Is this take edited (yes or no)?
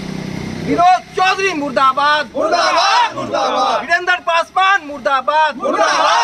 no